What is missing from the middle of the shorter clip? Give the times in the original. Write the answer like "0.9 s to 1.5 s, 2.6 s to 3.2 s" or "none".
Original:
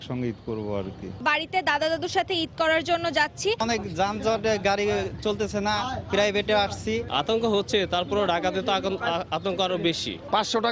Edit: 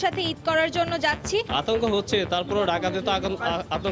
3.6 s to 7.1 s